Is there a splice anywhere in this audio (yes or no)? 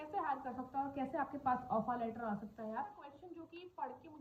yes